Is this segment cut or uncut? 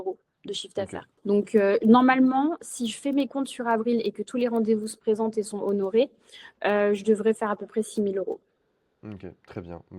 cut